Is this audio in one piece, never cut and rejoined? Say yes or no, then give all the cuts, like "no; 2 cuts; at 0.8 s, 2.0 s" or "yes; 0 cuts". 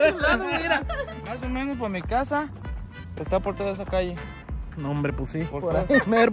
no; 1 cut; at 1.0 s